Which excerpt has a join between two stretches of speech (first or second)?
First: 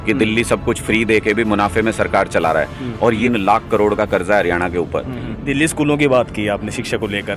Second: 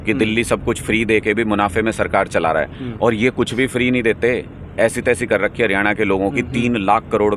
first